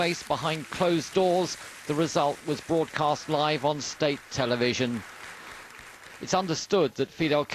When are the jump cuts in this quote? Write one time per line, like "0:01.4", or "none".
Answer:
none